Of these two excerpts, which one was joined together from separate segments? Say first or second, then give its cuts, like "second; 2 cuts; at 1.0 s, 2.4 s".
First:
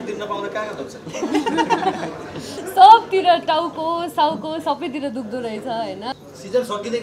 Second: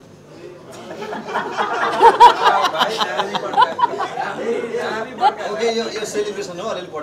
first; 2 cuts; at 2.6 s, 6.1 s